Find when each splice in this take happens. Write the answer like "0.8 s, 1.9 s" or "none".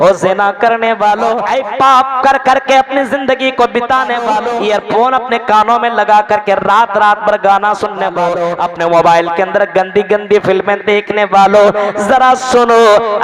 1.5 s, 4.5 s, 8.5 s